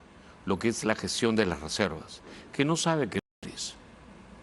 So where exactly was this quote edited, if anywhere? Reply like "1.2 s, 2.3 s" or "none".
3.3 s